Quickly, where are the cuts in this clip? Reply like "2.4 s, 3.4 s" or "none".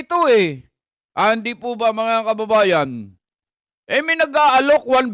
none